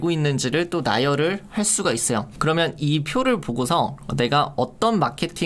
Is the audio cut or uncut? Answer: uncut